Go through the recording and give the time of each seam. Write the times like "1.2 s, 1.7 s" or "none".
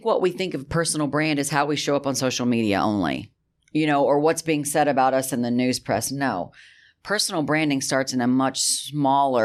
none